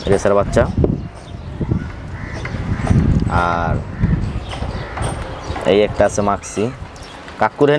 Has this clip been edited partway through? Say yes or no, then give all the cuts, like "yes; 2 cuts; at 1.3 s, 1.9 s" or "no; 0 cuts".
no; 0 cuts